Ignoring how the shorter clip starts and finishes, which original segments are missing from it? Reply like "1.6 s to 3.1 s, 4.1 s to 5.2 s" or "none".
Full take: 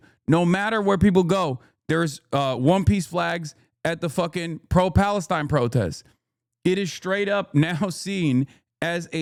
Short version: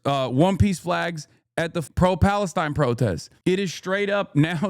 4.1 s to 4.6 s, 6.0 s to 6.5 s